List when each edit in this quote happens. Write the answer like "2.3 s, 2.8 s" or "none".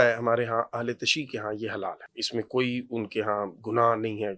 2.1 s